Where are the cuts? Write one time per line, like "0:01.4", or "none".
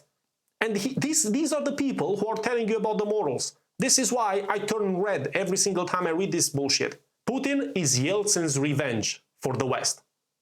0:07.1